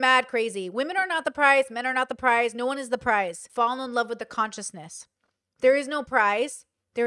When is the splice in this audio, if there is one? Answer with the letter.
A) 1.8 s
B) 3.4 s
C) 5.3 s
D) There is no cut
B